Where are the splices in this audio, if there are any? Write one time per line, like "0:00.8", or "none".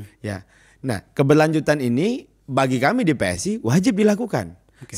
none